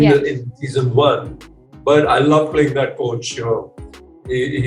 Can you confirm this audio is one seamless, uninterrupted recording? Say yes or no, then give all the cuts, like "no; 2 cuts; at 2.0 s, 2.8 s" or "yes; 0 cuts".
yes; 0 cuts